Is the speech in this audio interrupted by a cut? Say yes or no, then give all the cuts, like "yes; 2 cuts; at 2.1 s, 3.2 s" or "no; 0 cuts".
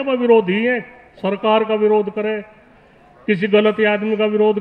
no; 0 cuts